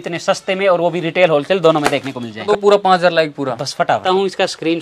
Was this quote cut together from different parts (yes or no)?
yes